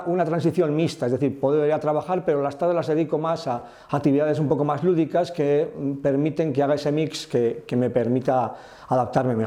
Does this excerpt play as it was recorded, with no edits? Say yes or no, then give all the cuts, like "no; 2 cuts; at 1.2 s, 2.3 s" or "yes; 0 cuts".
yes; 0 cuts